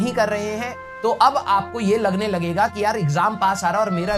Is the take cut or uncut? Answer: uncut